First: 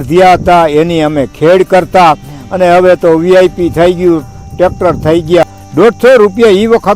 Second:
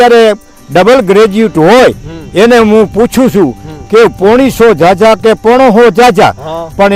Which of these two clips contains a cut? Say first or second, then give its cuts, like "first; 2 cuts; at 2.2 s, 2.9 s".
first; 1 cut; at 5.4 s